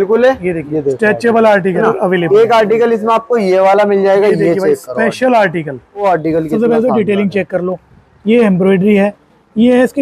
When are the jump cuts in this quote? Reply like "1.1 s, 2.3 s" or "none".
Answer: 1.8 s, 6.0 s